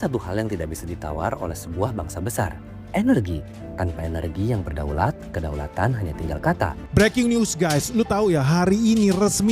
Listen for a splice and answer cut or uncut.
cut